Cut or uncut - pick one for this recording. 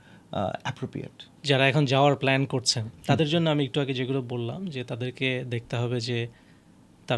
uncut